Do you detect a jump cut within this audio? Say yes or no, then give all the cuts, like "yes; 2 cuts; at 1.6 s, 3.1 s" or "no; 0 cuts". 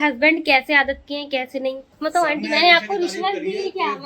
yes; 1 cut; at 1.9 s